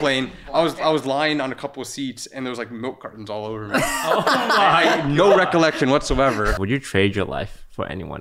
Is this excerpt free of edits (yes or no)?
no